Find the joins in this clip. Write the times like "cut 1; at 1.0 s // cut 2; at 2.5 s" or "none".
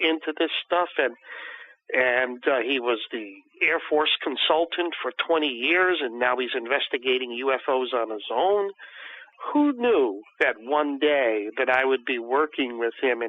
cut 1; at 9.3 s